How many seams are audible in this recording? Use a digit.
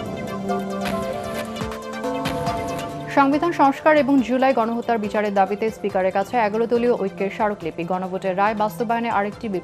2